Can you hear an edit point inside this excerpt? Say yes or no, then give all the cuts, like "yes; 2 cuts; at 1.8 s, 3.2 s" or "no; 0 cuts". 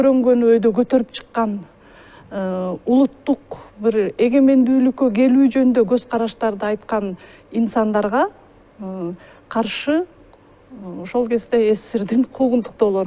no; 0 cuts